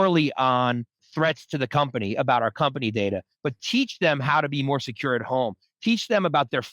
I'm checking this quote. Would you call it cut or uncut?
cut